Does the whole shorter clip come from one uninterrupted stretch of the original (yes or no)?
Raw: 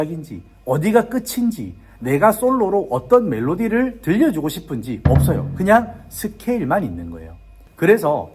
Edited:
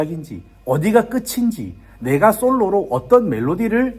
yes